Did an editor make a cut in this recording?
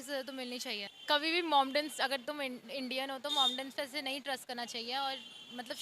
yes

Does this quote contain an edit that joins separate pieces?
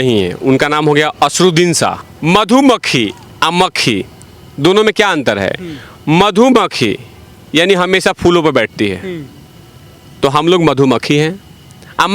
yes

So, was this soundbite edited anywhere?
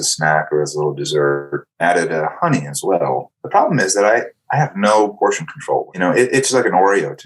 yes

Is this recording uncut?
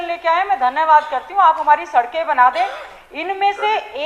yes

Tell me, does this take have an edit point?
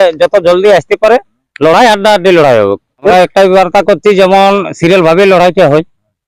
yes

